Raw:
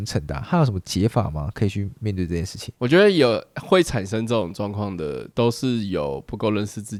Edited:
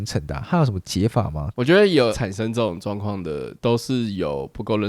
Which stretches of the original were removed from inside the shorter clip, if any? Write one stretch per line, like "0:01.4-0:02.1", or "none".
0:01.4-0:02.6
0:03.5-0:04.0